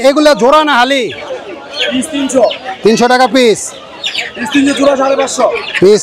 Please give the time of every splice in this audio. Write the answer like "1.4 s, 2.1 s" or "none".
none